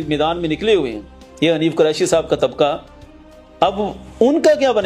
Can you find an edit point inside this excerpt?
no; 0 cuts

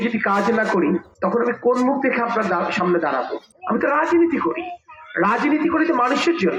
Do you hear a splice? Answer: no; 0 cuts

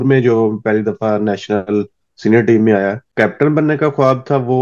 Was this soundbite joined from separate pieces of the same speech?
yes; 1 cut; at 3.0 s

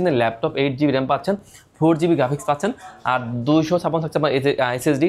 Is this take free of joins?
yes; 0 cuts

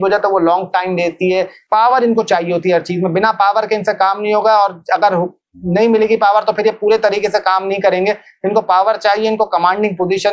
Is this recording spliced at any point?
yes; 1 cut; at 1.6 s

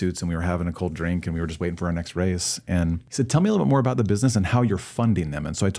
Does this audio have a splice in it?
yes; 1 cut; at 3.0 s

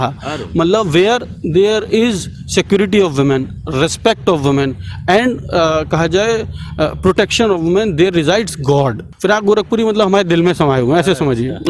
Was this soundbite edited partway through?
yes; 1 cut; at 9.1 s

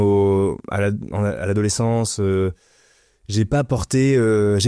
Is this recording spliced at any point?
no; 0 cuts

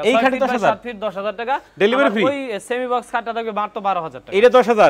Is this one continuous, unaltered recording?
yes; 0 cuts

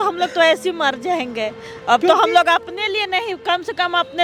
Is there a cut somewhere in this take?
no; 0 cuts

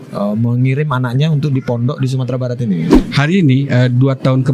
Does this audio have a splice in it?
yes; 1 cut; at 2.9 s

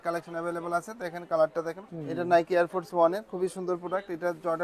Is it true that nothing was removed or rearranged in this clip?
no; 1 cut; at 1.9 s

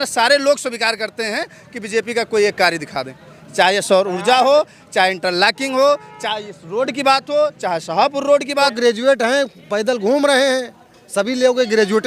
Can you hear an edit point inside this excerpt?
yes; 1 cut; at 8.7 s

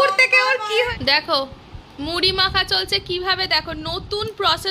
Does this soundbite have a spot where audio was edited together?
yes; 1 cut; at 1.0 s

